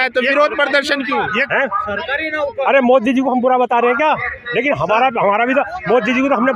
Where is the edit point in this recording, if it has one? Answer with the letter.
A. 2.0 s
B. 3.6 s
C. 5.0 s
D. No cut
D